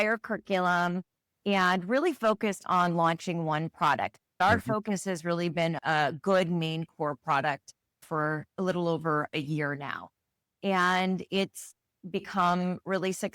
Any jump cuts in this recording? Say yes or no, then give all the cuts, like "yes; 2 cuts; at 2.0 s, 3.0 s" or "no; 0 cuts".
yes; 2 cuts; at 4.4 s, 8.5 s